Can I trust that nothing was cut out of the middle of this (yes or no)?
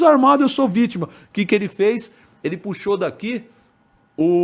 yes